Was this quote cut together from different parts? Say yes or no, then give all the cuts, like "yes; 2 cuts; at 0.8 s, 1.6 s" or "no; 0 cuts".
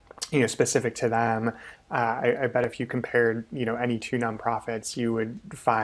no; 0 cuts